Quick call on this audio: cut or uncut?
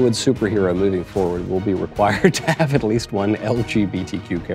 uncut